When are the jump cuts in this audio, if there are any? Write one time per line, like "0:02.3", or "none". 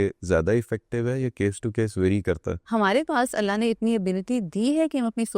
0:02.6